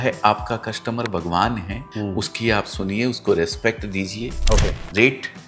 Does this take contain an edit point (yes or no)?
yes